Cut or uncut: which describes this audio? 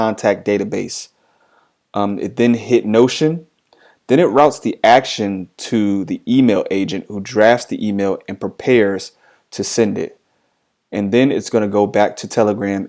uncut